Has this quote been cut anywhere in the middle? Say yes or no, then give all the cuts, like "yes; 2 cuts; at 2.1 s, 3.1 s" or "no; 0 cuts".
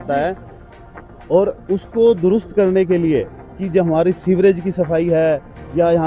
no; 0 cuts